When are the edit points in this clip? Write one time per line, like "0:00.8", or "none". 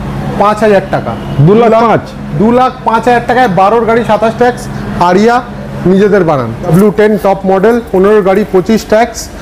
0:06.7